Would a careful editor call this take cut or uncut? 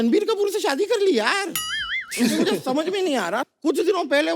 uncut